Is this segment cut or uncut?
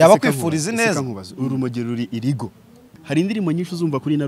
cut